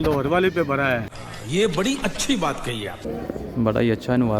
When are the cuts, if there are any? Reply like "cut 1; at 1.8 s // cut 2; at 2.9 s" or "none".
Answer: cut 1; at 3.2 s